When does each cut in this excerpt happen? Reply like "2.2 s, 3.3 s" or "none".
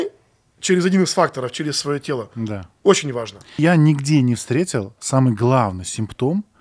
3.6 s